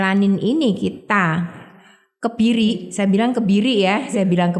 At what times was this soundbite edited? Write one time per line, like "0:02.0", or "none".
none